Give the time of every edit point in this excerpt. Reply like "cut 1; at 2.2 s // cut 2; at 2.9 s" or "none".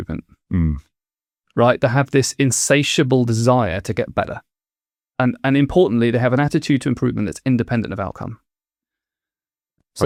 none